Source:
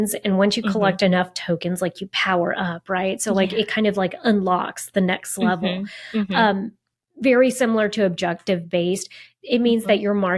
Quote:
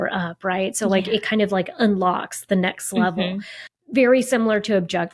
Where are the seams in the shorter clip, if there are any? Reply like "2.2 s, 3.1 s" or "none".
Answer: 3.5 s